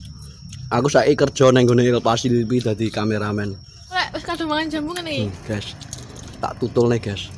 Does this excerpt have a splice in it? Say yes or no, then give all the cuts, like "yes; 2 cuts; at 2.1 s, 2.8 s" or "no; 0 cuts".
yes; 1 cut; at 4.0 s